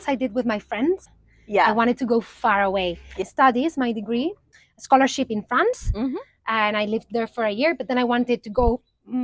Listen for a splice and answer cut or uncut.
cut